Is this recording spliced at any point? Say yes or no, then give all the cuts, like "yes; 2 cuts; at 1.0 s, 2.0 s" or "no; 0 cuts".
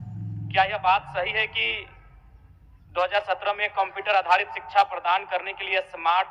no; 0 cuts